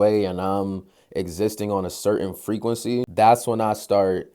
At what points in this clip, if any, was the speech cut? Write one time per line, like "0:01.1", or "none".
0:03.1

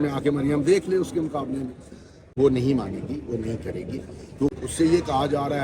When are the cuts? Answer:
0:02.3
0:04.5

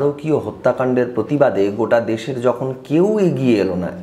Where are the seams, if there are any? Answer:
none

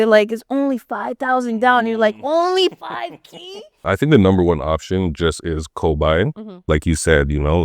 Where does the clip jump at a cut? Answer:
0:03.7

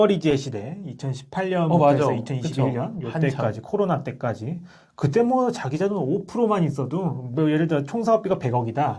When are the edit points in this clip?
none

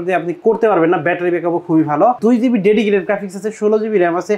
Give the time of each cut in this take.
0:02.2

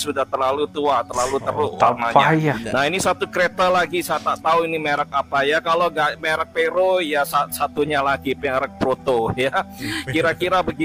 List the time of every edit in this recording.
none

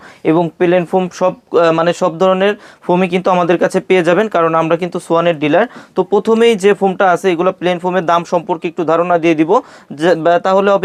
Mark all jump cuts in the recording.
none

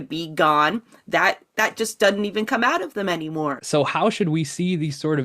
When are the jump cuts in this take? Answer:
0:03.6

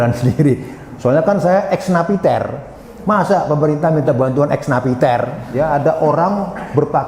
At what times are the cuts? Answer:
0:05.4

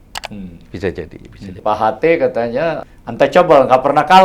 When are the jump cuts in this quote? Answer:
0:01.5
0:02.9

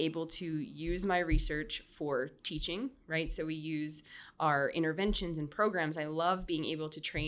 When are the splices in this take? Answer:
none

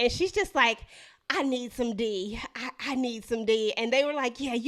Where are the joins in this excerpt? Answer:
none

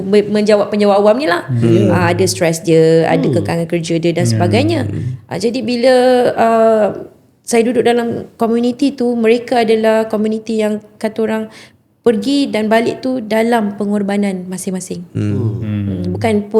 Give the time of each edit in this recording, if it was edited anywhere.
none

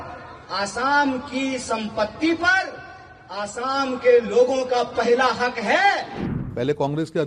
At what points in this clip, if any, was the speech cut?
0:06.2

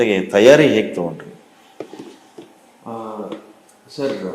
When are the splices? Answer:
none

